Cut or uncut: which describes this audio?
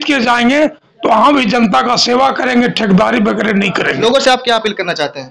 cut